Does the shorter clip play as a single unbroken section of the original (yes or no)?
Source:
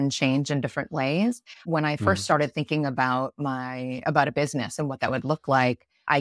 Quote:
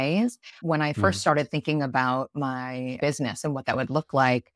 no